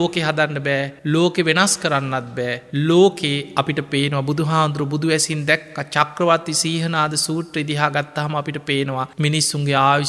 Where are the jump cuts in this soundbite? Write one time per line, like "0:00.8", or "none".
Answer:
0:00.9
0:02.6
0:09.1